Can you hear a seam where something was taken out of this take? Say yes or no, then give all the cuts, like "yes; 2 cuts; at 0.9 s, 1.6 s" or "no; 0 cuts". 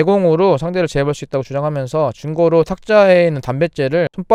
no; 0 cuts